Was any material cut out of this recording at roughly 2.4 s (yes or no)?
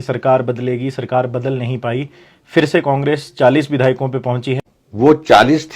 no